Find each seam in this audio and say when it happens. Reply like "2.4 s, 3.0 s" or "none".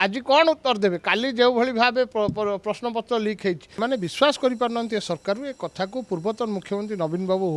3.8 s